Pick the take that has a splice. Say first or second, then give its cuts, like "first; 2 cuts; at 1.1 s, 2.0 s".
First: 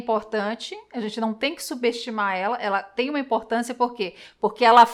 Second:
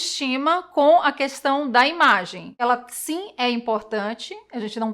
second; 1 cut; at 2.5 s